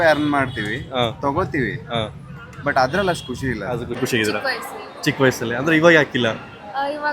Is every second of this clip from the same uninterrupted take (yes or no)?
no